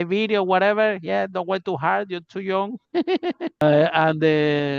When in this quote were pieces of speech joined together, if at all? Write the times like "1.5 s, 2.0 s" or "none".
3.6 s